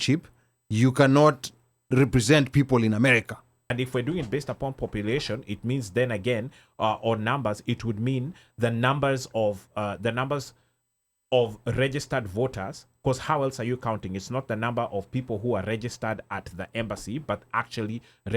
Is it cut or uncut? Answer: cut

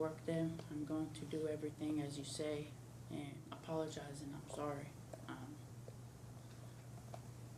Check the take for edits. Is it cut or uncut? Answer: cut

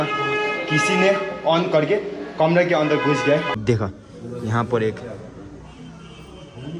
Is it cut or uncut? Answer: cut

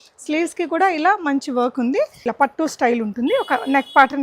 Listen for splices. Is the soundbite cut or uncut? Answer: cut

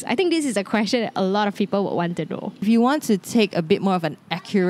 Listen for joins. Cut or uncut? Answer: cut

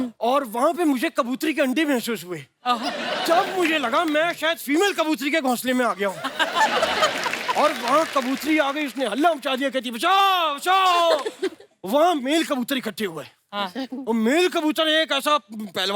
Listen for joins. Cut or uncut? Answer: uncut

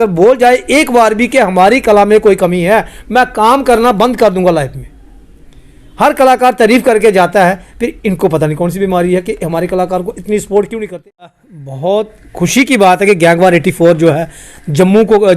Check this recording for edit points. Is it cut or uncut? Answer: cut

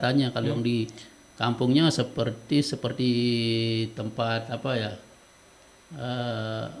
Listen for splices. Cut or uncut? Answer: uncut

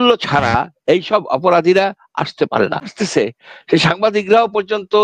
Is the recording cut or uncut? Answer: cut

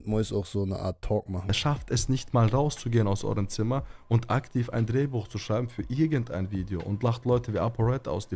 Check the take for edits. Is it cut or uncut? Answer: cut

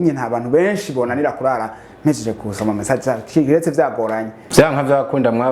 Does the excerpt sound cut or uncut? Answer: cut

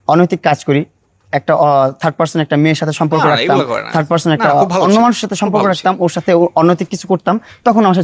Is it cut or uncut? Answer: uncut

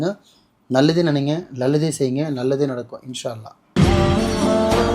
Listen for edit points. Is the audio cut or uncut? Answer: cut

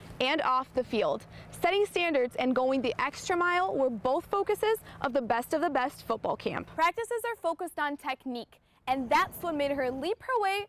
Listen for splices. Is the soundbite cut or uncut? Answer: cut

